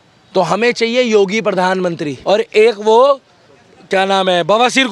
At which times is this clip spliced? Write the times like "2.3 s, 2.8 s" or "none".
2.1 s